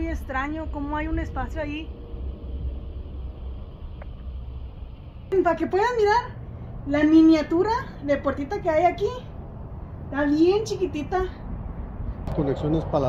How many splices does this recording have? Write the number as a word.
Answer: two